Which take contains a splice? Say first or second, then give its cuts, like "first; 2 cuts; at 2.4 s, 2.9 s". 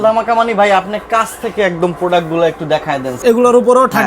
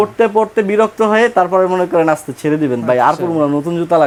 first; 1 cut; at 3.1 s